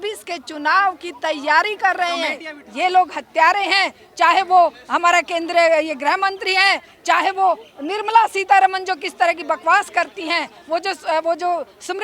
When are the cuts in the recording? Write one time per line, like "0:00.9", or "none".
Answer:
0:02.6

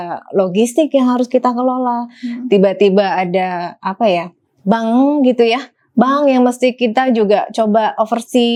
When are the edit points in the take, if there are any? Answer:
none

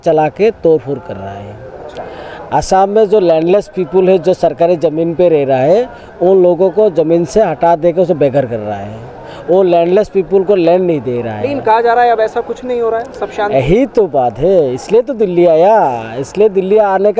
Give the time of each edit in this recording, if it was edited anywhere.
none

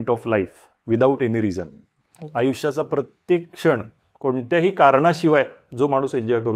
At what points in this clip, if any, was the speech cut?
none

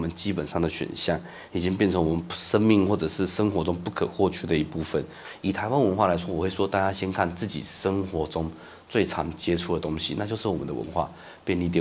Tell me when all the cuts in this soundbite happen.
0:05.2

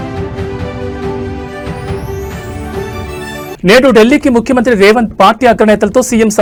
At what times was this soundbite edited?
none

